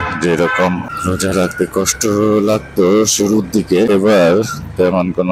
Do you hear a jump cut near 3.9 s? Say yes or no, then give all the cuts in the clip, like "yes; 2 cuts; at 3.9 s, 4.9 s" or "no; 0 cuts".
yes; 2 cuts; at 0.9 s, 3.9 s